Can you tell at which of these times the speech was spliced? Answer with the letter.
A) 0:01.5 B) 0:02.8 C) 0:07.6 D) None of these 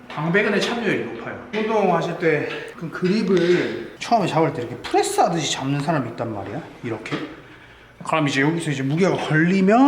A